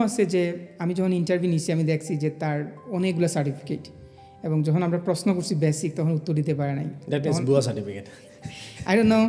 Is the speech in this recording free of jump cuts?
yes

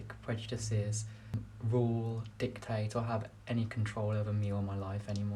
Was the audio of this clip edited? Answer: yes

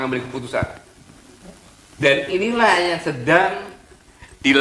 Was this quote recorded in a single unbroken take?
yes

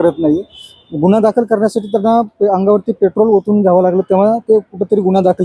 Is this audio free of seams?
yes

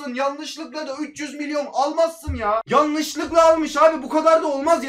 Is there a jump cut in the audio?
yes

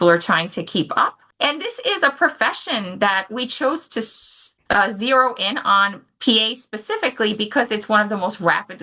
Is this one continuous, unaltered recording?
no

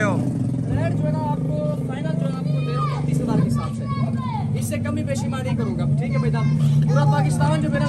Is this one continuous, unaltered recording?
yes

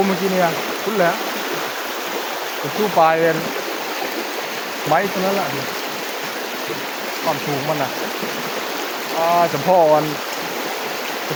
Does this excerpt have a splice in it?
no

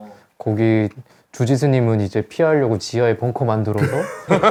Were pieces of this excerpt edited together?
no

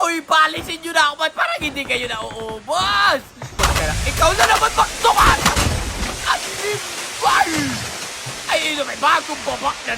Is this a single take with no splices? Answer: no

